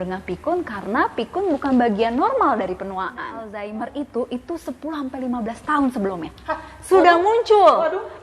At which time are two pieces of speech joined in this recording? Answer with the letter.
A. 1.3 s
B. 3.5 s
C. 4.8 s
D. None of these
B